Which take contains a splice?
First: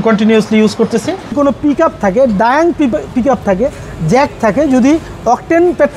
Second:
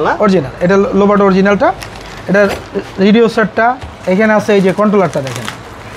first; 1 cut; at 1.3 s

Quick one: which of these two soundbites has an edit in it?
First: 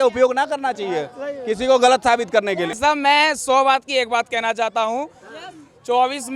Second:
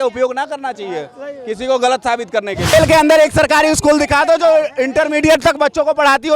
second; 1 cut; at 2.6 s

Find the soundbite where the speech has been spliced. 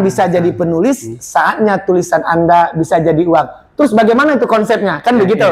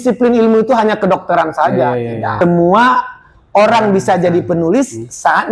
second; 1 cut; at 2.4 s

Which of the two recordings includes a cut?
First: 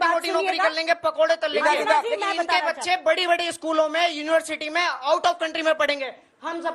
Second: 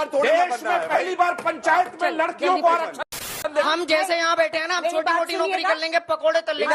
second; 1 cut; at 3.0 s

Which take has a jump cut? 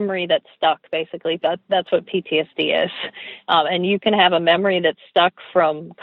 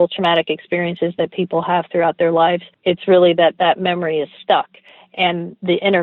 second; 1 cut; at 2.7 s

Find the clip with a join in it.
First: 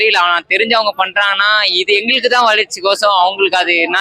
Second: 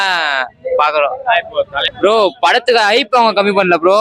second; 1 cut; at 1.8 s

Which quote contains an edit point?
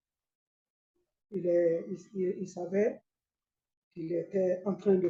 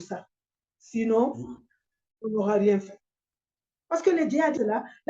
second; 1 cut; at 3.2 s

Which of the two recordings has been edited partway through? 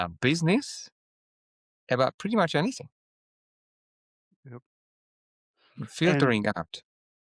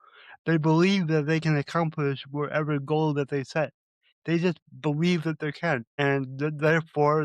second; 1 cut; at 5.9 s

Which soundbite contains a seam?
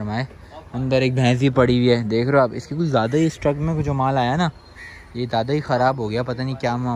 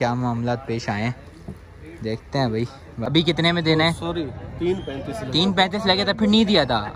second; 1 cut; at 3.1 s

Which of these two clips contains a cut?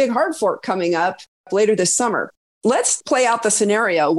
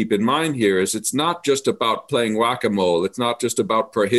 first; 2 cuts; at 1.5 s, 2.7 s

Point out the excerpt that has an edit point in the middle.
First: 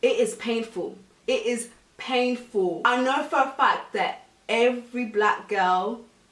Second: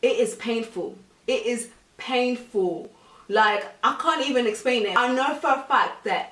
first; 1 cut; at 2.8 s

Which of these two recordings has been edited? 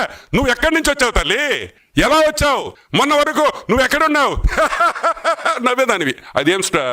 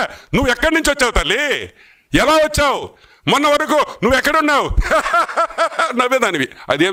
first; 2 cuts; at 1.7 s, 2.8 s

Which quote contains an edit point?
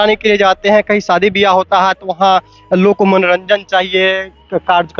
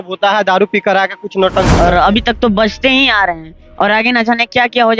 second; 1 cut; at 1.7 s

